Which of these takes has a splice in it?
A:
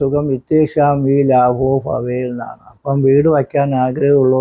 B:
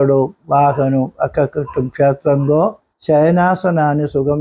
B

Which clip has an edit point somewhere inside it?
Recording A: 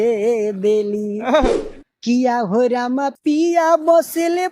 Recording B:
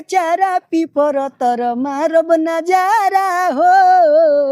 A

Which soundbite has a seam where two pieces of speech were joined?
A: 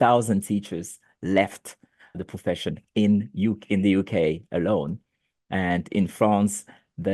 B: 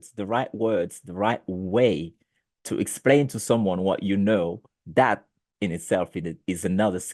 A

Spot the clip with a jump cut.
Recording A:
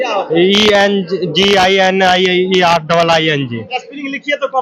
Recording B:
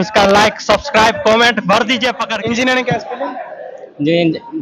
B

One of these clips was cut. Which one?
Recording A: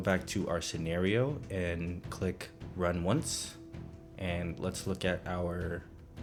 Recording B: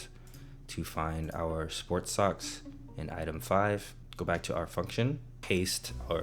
B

